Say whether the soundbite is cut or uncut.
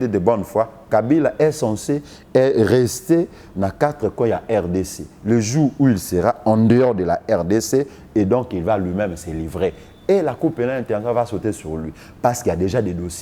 uncut